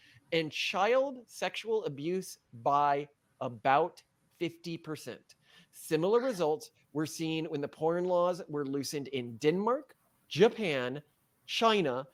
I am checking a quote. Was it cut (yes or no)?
no